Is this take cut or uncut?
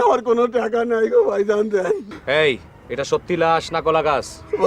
cut